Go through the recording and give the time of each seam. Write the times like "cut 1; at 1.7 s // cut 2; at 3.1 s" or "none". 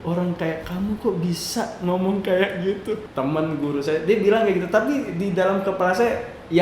cut 1; at 3.1 s